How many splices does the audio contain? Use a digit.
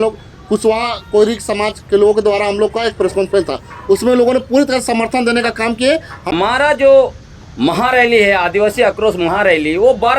1